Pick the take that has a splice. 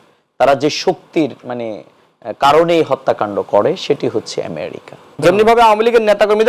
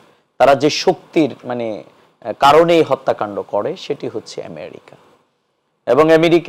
first; 1 cut; at 5.2 s

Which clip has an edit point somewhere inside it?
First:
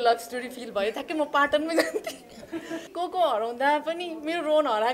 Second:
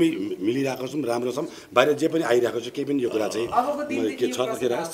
first; 1 cut; at 2.9 s

